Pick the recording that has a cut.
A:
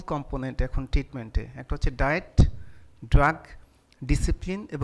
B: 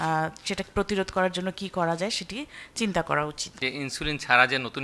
B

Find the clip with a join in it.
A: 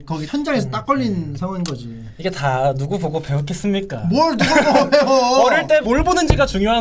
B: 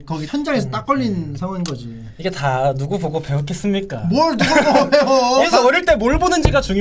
A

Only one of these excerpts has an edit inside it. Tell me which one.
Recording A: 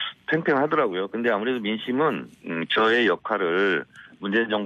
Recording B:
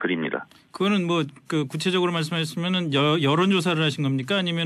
A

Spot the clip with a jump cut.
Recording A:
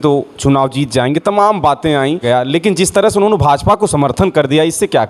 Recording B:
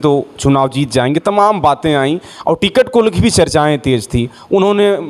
A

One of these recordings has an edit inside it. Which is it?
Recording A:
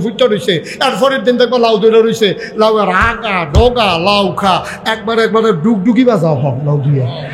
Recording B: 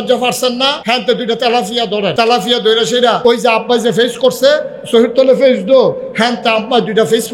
B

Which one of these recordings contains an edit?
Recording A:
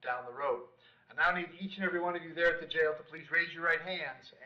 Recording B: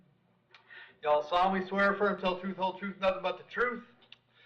B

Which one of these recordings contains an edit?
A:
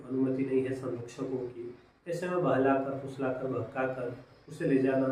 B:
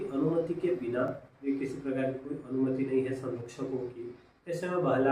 B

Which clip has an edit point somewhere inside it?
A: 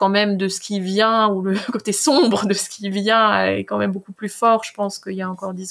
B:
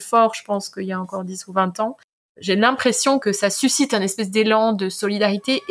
B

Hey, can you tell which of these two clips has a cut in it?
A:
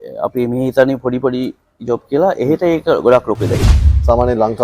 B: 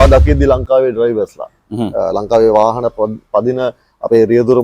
A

